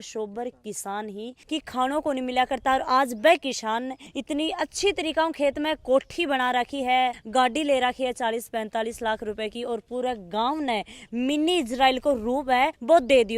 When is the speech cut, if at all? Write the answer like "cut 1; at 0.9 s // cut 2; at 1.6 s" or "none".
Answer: cut 1; at 1.4 s